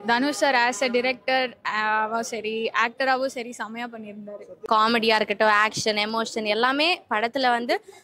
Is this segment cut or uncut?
cut